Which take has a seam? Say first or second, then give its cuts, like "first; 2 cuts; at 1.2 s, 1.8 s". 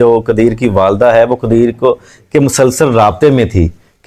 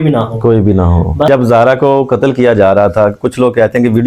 second; 1 cut; at 1.3 s